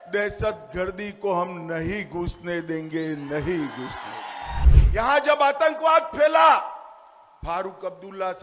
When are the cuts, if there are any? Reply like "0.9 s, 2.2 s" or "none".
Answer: 4.7 s